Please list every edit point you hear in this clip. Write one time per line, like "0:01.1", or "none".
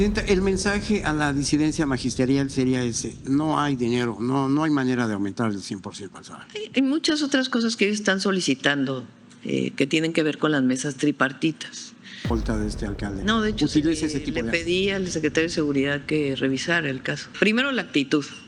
0:12.3
0:17.3